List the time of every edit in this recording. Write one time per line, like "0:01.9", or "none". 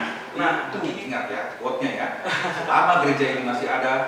0:00.9